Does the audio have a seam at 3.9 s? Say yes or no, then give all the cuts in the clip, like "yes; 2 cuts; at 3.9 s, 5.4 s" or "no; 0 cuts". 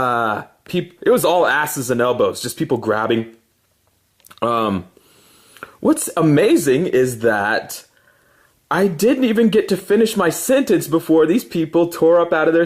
yes; 1 cut; at 3.9 s